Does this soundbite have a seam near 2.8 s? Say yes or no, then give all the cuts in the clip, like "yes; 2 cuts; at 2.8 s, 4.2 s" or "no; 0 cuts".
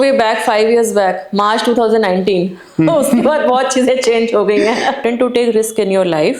no; 1 cut; at 5.0 s